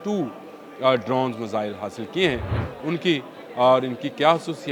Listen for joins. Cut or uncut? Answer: uncut